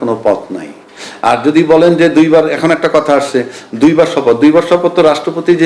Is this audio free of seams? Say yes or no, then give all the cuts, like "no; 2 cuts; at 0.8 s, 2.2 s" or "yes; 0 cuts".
yes; 0 cuts